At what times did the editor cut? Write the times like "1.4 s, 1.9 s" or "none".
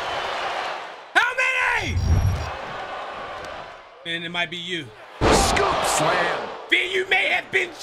2.2 s